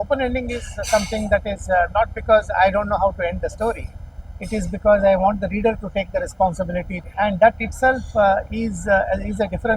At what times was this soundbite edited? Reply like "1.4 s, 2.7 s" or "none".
7.0 s